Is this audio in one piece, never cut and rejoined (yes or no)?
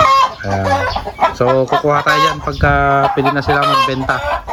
yes